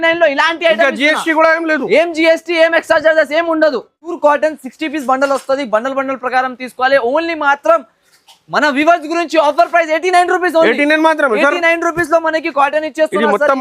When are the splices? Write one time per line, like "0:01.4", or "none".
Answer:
0:04.2